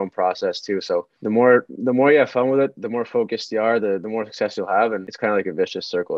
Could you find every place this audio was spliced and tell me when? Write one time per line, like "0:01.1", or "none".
0:05.1